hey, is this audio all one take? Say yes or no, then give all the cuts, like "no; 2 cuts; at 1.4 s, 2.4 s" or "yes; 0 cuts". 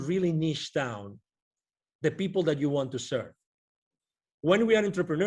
yes; 0 cuts